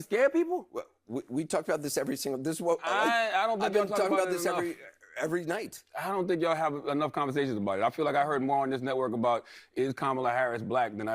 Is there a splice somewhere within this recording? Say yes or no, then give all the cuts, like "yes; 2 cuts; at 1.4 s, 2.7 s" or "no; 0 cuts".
yes; 1 cut; at 3.8 s